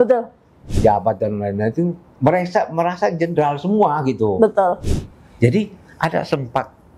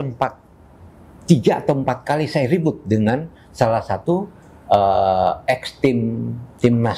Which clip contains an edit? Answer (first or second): first